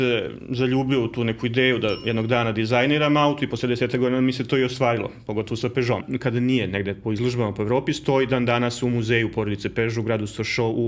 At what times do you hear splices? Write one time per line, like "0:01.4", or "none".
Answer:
0:06.0